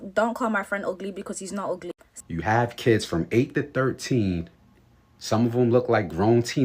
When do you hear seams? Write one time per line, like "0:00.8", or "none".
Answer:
0:02.1